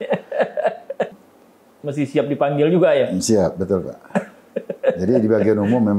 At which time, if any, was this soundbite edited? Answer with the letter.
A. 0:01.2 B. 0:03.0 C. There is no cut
A